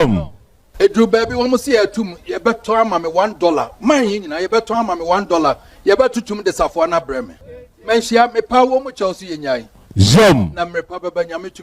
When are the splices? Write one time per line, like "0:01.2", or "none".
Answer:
0:07.3